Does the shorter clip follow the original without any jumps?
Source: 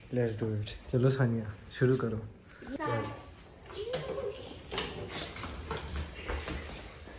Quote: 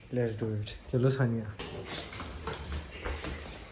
no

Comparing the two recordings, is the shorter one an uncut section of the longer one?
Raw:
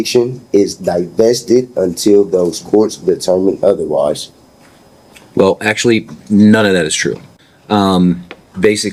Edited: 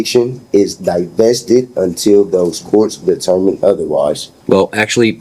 no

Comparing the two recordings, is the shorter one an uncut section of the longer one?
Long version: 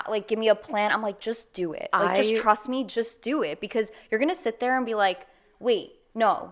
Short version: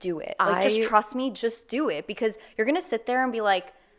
yes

